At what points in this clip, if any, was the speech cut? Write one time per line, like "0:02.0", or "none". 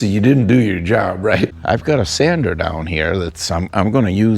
0:01.6